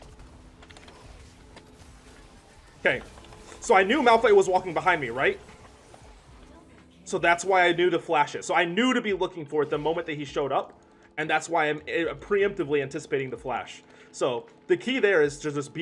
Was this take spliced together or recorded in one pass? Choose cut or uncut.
uncut